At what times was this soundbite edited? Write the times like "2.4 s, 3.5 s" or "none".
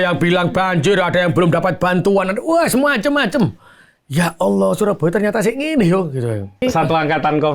6.6 s